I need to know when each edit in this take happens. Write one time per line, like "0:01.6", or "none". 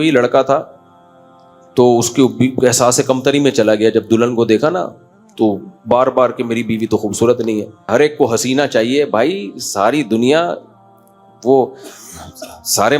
0:07.9